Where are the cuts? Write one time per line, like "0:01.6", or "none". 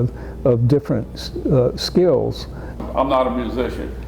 0:02.8